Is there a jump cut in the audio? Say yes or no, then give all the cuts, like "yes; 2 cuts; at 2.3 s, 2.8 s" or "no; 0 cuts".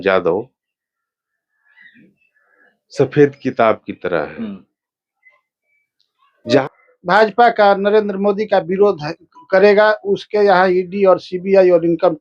yes; 1 cut; at 6.6 s